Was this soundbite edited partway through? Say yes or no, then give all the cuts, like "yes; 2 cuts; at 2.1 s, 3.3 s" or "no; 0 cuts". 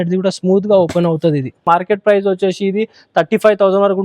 yes; 1 cut; at 1.6 s